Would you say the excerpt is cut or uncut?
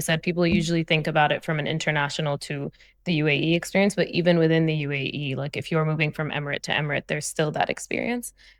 uncut